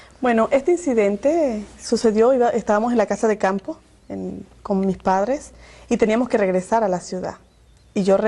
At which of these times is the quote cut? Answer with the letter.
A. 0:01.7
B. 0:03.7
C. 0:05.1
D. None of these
B